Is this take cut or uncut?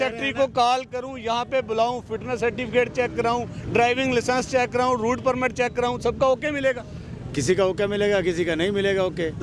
uncut